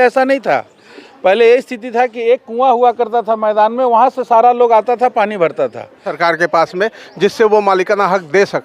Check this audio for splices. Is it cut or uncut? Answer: cut